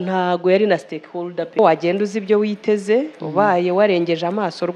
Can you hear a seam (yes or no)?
yes